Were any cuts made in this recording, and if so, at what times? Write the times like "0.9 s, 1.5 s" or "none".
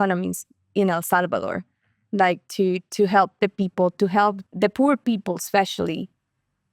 4.4 s

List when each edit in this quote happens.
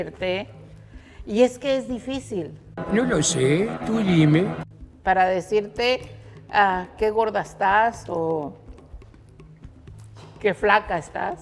none

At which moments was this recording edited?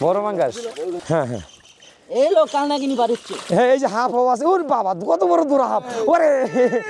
1.0 s

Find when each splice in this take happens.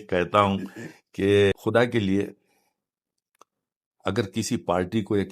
1.5 s

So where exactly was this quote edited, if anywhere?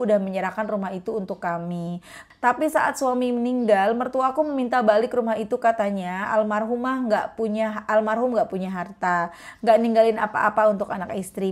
2.1 s

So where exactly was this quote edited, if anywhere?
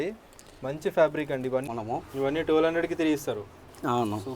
1.7 s

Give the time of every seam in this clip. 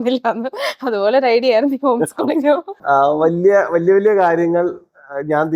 2.7 s

